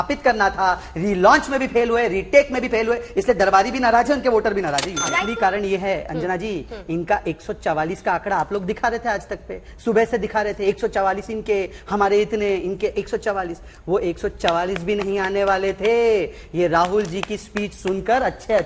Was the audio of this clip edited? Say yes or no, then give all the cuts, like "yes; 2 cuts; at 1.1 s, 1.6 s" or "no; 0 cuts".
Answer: yes; 1 cut; at 4.9 s